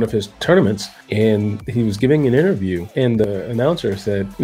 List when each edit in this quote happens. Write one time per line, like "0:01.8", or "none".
0:02.8